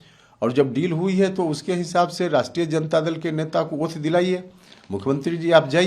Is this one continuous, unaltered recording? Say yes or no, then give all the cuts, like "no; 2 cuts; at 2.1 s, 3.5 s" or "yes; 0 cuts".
yes; 0 cuts